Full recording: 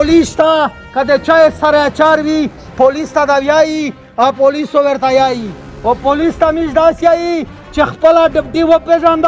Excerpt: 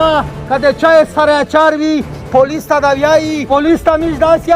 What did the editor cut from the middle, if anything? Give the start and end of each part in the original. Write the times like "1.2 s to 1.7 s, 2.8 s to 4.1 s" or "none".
3.9 s to 6.0 s